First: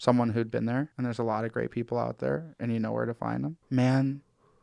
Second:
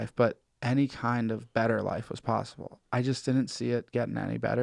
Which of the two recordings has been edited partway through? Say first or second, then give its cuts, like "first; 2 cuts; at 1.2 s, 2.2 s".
first; 2 cuts; at 0.9 s, 3.6 s